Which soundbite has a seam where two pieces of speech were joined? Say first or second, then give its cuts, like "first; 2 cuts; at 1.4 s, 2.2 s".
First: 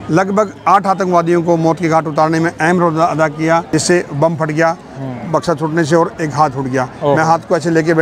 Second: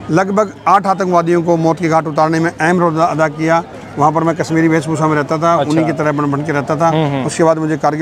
first; 1 cut; at 3.7 s